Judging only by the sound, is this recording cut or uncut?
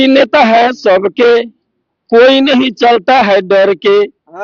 uncut